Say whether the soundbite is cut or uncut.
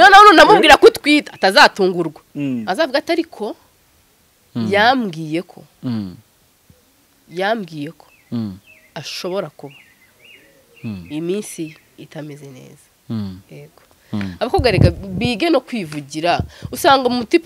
uncut